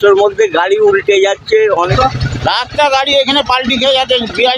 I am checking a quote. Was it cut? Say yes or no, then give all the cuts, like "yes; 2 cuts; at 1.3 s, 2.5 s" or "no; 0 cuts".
yes; 1 cut; at 1.9 s